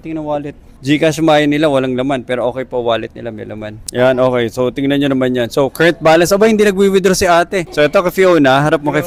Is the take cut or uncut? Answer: uncut